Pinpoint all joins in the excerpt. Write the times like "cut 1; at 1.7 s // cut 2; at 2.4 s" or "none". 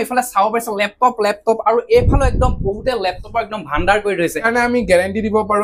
cut 1; at 4.5 s